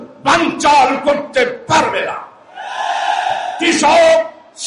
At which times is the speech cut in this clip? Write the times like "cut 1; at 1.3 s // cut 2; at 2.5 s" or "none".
cut 1; at 3.5 s